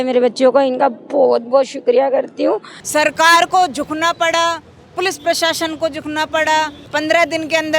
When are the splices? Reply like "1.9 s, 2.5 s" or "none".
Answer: 2.7 s, 6.8 s